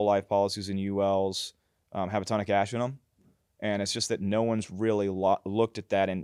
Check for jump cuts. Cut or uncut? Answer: uncut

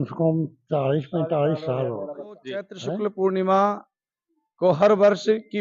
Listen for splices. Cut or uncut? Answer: cut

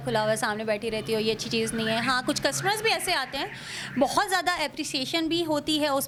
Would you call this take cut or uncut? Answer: uncut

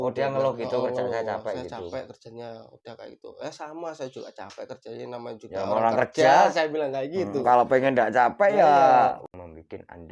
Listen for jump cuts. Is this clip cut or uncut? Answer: cut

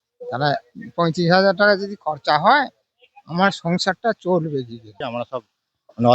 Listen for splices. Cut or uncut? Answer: cut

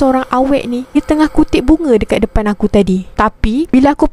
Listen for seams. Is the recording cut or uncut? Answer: cut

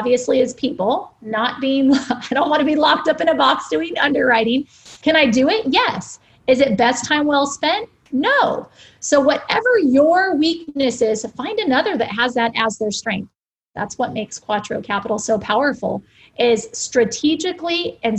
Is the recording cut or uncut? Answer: cut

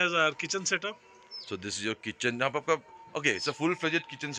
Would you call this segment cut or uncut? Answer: uncut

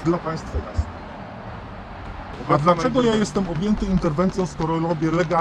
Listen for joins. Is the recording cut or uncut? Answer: cut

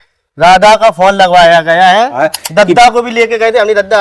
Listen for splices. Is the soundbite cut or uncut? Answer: cut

